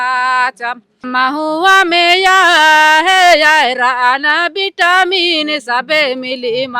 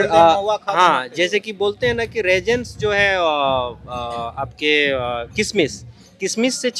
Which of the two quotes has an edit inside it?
first; 1 cut; at 1.1 s

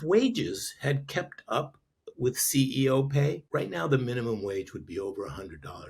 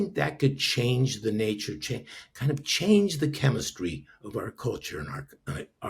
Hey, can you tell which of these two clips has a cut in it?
first; 1 cut; at 3.4 s

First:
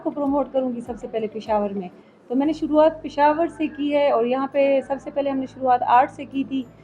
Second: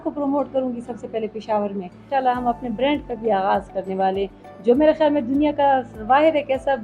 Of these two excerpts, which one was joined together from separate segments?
second; 1 cut; at 2.1 s

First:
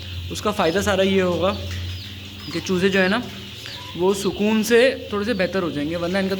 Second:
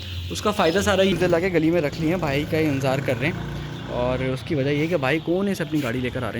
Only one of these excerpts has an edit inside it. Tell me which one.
second; 1 cut; at 1.1 s

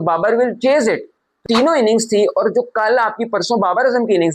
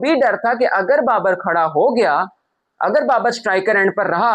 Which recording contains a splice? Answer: first; 1 cut; at 1.4 s

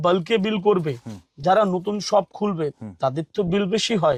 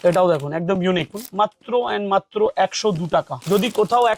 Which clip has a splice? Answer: second; 2 cuts; at 1.2 s, 3.4 s

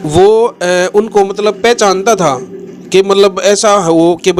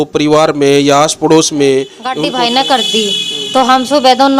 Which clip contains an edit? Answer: second; 1 cut; at 2.0 s

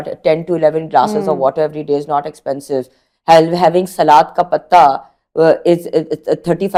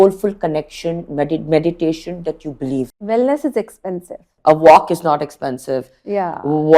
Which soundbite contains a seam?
second; 2 cuts; at 3.0 s, 4.3 s

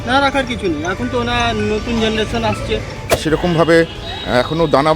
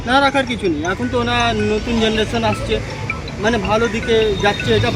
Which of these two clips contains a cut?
first; 1 cut; at 3.2 s

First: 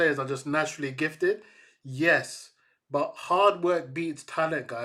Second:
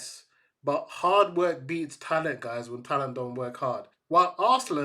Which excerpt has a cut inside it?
second; 1 cut; at 3.9 s

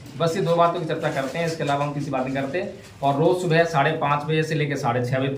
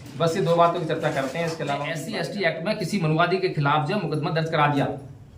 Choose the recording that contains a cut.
second; 1 cut; at 2.1 s

